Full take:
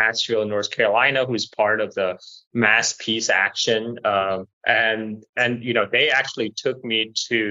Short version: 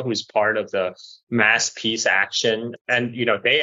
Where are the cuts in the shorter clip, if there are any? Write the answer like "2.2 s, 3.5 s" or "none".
2.7 s